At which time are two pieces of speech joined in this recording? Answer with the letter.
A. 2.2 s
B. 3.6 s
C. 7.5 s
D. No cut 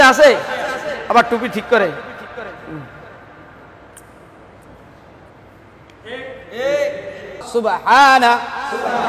C